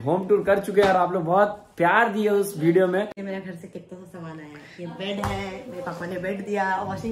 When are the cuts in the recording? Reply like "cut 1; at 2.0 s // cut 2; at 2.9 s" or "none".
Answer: cut 1; at 3.2 s